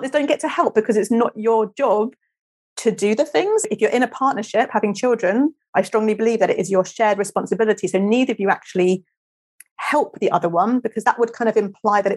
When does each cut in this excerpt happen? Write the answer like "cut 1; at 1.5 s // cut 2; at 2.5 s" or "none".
cut 1; at 3.7 s